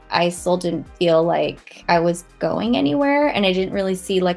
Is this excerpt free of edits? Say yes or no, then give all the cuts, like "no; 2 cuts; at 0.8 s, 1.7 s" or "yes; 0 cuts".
no; 1 cut; at 1.7 s